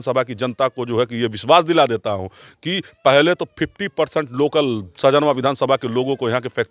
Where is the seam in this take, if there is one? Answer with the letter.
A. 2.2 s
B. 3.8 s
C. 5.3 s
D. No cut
D